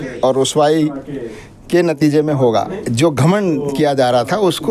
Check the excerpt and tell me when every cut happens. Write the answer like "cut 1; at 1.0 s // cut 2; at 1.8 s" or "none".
cut 1; at 2.7 s